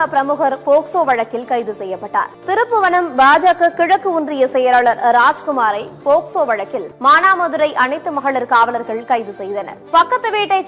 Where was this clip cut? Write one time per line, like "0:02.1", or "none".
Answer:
0:02.3
0:06.8
0:09.7